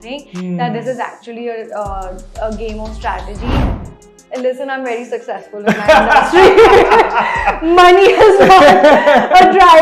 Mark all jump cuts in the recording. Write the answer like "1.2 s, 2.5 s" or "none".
3.8 s

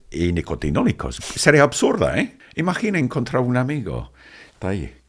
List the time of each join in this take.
2.4 s

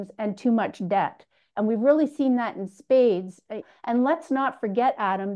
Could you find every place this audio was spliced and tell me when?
3.6 s

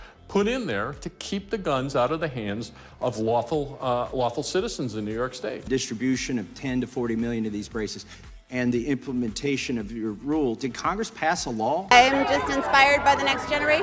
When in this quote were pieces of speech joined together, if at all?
5.6 s, 11.9 s

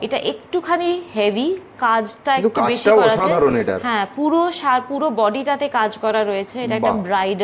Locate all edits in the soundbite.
none

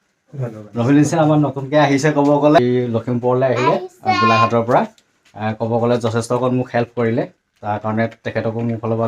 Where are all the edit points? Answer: 2.6 s

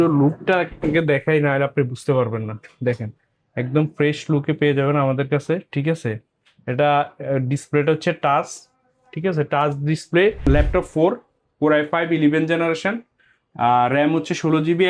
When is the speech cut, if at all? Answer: 10.5 s

